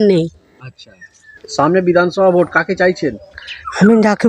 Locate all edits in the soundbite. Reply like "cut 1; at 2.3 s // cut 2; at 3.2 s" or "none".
cut 1; at 1.4 s